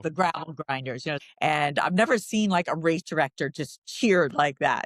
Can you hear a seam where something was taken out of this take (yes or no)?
yes